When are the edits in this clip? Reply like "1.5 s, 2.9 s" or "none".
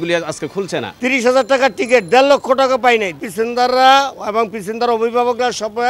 0.9 s, 3.2 s